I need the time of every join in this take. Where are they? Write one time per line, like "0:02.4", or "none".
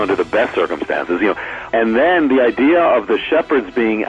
0:01.7